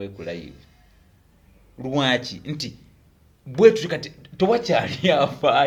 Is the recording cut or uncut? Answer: uncut